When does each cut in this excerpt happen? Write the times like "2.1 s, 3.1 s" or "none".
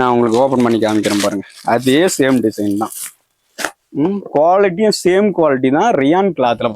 none